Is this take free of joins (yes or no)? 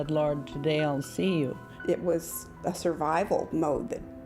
no